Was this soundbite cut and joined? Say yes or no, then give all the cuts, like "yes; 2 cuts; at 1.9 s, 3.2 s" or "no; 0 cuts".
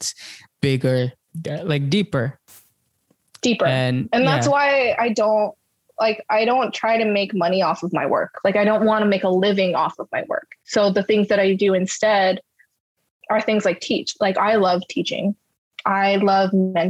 yes; 1 cut; at 8.3 s